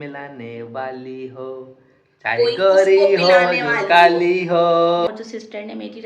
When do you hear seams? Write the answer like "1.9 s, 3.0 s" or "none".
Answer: 5.1 s